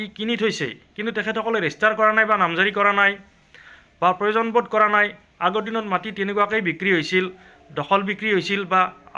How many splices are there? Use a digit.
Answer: 0